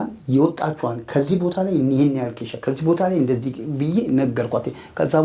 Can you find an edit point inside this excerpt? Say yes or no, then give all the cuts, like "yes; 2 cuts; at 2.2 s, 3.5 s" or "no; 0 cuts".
no; 0 cuts